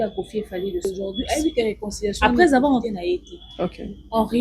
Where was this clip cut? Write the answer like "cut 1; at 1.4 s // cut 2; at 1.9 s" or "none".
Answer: cut 1; at 0.8 s // cut 2; at 2.2 s // cut 3; at 2.8 s

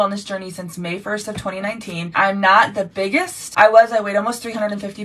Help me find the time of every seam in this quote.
cut 1; at 2.1 s // cut 2; at 3.4 s

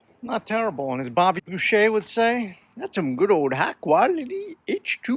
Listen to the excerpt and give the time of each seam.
cut 1; at 1.4 s

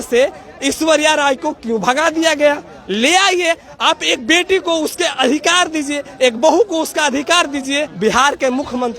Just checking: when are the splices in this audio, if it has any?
cut 1; at 7.9 s

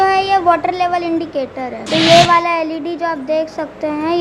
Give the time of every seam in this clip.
cut 1; at 1.7 s

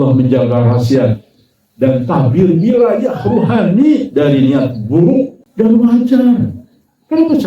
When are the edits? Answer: cut 1; at 5.4 s

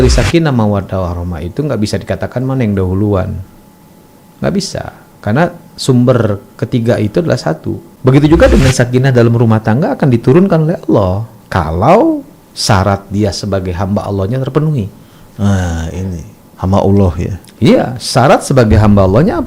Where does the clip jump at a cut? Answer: cut 1; at 7.9 s

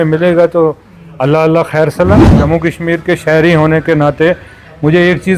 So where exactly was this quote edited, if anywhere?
cut 1; at 2.3 s

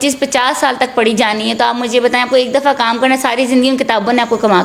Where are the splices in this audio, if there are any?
none

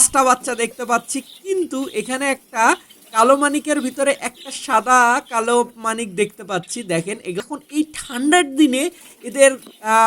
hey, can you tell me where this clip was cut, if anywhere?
cut 1; at 7.4 s

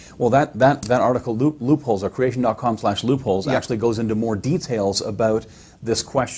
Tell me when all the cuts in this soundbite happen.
none

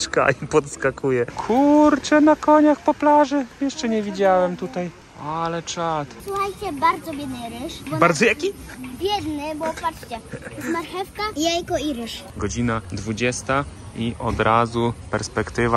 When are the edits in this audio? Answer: cut 1; at 1.3 s // cut 2; at 5.1 s // cut 3; at 6.2 s // cut 4; at 12.3 s

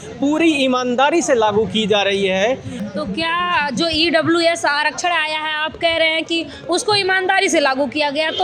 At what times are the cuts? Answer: cut 1; at 2.8 s

